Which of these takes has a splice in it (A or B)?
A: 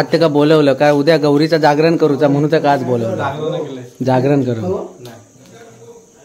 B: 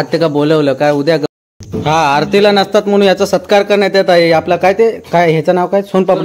B